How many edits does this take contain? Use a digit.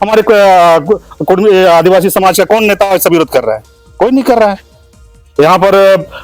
0